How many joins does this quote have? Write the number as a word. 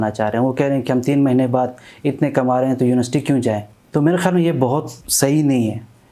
two